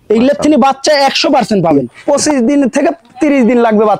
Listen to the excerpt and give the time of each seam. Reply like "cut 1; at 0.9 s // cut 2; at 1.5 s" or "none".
cut 1; at 1.9 s

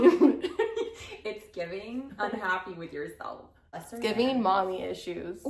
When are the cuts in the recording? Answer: cut 1; at 3.8 s

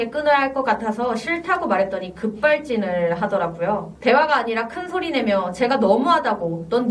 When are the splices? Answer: cut 1; at 3.9 s

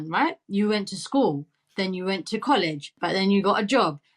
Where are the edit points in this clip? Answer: cut 1; at 3.0 s

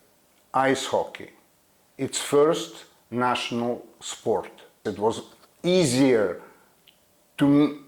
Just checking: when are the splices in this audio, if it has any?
cut 1; at 4.8 s

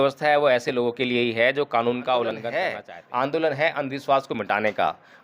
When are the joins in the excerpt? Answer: cut 1; at 2.5 s

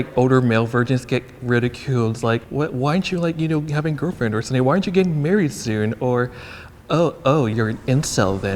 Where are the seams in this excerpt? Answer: cut 1; at 2.5 s // cut 2; at 7.5 s

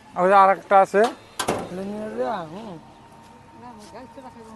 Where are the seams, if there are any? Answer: cut 1; at 1.7 s

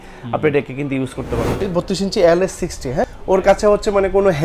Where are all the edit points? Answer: cut 1; at 1.5 s // cut 2; at 3.0 s

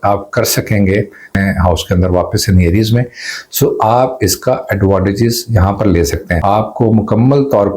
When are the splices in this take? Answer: cut 1; at 1.3 s // cut 2; at 6.3 s

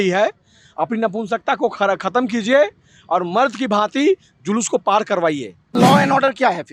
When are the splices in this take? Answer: cut 1; at 5.8 s

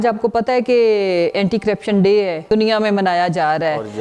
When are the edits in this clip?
cut 1; at 2.5 s

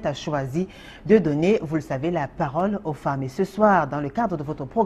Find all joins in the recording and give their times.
none

